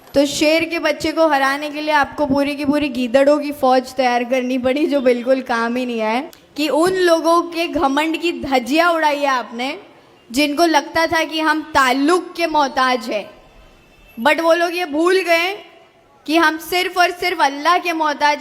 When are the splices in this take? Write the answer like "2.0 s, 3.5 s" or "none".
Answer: 6.4 s

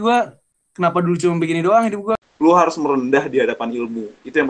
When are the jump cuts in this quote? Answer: 2.2 s

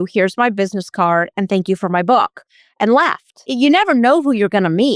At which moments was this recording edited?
3.4 s

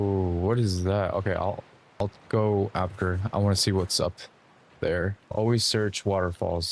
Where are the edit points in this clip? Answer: 5.2 s

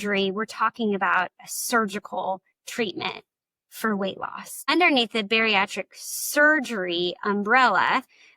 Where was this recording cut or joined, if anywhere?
4.7 s

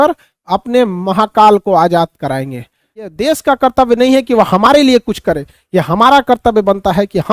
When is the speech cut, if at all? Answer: 3.2 s

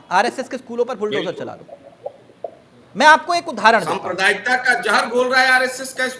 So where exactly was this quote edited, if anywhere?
none

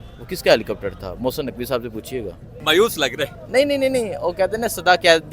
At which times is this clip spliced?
2.5 s

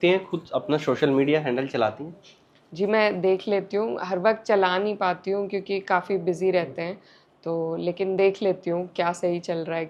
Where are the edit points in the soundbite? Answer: none

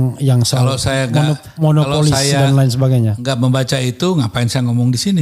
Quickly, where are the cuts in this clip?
none

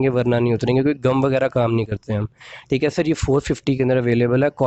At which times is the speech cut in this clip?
none

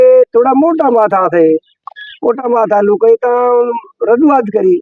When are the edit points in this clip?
none

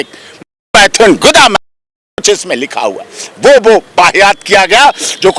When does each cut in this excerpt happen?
none

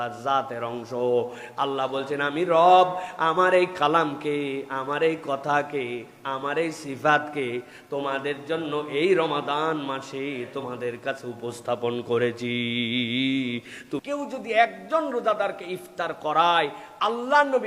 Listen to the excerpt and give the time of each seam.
14.0 s

